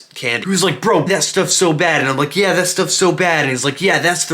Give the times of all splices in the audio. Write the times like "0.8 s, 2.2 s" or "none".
1.1 s